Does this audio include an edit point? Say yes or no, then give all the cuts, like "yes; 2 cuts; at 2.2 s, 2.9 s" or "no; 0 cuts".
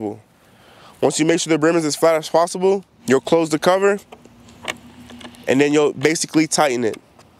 yes; 2 cuts; at 2.9 s, 4.5 s